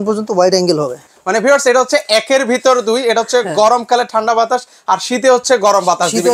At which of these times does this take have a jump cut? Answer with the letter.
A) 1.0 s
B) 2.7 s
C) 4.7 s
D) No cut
A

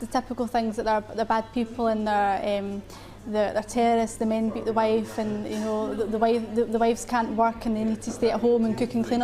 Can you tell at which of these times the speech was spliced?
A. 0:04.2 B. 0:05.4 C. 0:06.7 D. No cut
D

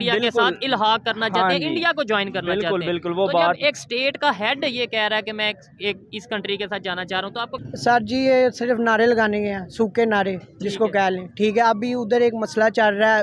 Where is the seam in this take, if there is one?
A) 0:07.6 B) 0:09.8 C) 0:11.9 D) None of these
A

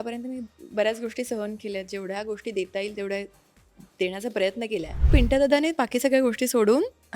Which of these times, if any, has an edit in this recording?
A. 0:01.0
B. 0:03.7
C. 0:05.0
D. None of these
C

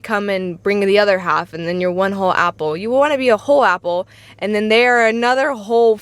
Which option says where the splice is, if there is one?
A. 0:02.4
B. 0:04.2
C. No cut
C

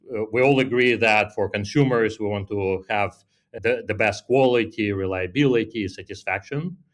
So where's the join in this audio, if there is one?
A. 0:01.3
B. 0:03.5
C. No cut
B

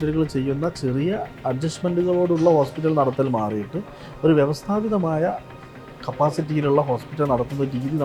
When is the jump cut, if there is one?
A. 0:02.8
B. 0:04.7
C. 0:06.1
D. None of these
D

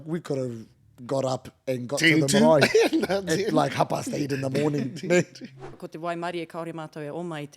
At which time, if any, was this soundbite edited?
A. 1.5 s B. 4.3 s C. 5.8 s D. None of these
C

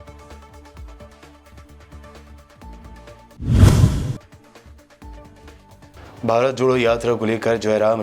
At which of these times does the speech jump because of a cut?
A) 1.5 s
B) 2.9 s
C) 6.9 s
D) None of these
B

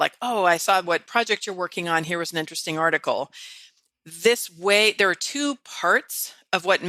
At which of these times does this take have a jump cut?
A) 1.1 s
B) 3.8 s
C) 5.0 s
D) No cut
D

